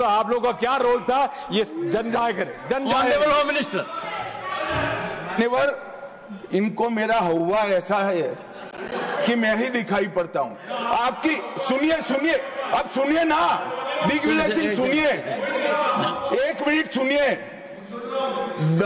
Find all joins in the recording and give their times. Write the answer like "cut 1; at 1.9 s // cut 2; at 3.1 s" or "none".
none